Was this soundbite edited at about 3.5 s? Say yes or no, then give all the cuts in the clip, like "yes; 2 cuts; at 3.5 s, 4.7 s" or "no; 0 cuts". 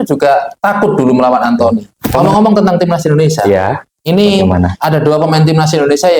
no; 1 cut; at 2.2 s